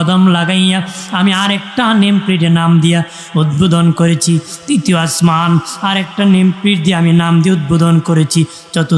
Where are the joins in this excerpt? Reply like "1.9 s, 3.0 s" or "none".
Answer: none